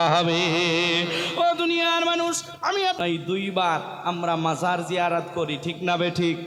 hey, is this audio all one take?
no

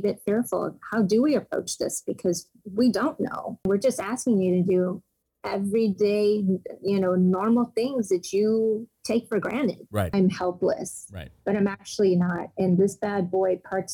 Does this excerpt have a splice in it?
yes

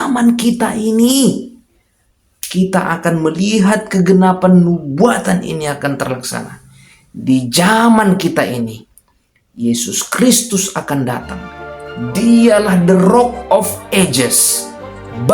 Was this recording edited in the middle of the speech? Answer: no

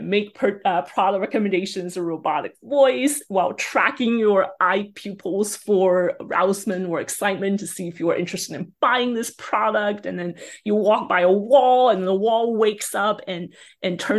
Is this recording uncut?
yes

